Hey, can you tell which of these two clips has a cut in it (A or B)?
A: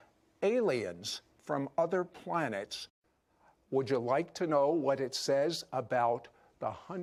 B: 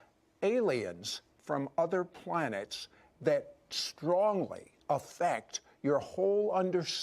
B